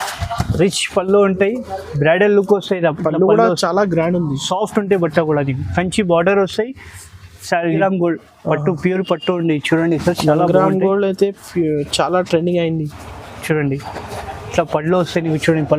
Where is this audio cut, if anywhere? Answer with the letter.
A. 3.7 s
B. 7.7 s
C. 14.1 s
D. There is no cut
B